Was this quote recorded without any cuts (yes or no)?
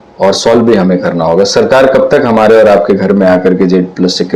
yes